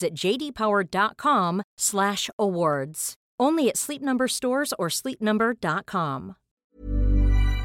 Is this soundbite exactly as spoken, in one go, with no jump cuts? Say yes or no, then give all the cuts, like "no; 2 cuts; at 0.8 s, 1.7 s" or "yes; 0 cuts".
no; 1 cut; at 6.5 s